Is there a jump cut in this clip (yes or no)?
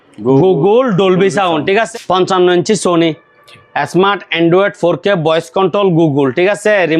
yes